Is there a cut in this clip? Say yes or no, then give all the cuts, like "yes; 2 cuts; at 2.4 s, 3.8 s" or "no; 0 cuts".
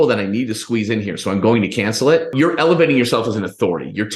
yes; 1 cut; at 2.3 s